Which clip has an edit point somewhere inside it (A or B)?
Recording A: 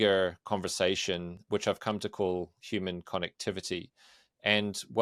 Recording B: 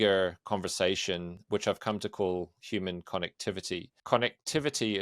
B